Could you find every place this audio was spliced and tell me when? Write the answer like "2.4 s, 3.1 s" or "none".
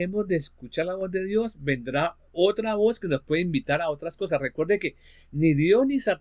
none